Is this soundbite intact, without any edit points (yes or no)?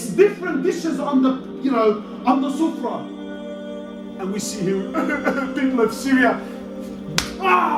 yes